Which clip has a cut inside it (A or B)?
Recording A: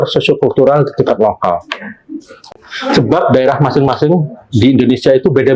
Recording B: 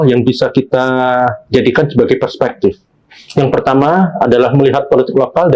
A